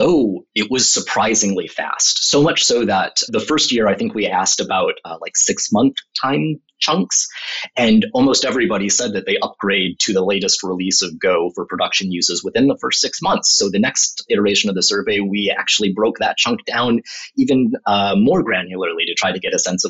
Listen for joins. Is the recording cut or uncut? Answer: uncut